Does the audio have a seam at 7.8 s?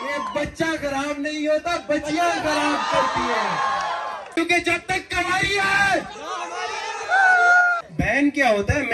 yes; 2 cuts; at 4.4 s, 7.8 s

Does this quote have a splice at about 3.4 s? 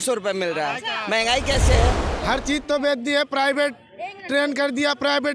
no; 1 cut; at 2.1 s

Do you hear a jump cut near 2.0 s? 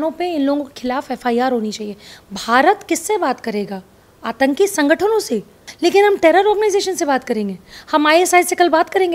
no; 1 cut; at 5.6 s

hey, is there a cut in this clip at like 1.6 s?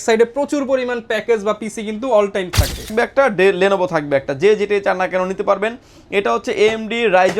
no; 1 cut; at 2.9 s

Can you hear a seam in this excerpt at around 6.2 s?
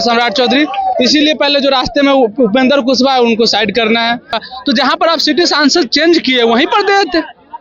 no; 1 cut; at 4.4 s

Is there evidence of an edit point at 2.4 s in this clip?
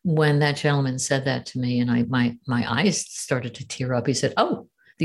no; 0 cuts

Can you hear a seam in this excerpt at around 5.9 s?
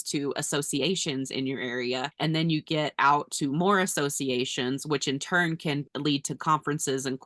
yes; 2 cuts; at 2.1 s, 5.9 s

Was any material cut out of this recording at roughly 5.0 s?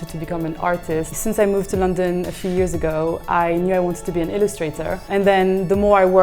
yes; 2 cuts; at 1.2 s, 5.0 s

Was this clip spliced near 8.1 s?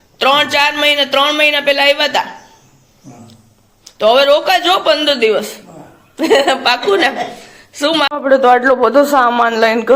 yes; 1 cut; at 8.1 s

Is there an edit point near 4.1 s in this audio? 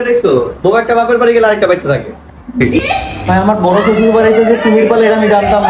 no; 1 cut; at 2.6 s

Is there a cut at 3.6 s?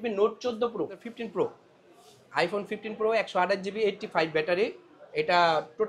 no; 1 cut; at 1.2 s

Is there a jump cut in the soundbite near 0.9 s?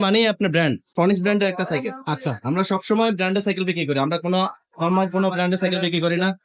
yes; 1 cut; at 0.9 s

